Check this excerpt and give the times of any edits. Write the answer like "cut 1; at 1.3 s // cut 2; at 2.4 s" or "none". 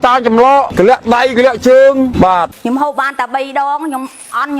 cut 1; at 2.5 s